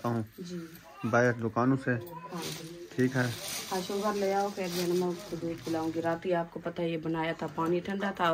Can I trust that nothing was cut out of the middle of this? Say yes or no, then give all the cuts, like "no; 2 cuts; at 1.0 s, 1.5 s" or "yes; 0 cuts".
yes; 0 cuts